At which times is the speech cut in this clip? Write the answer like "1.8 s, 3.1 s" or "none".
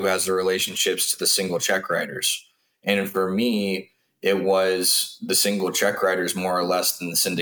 none